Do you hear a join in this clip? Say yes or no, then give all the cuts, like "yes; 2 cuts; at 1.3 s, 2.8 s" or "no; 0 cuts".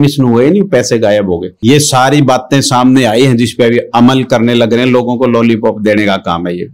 yes; 1 cut; at 1.5 s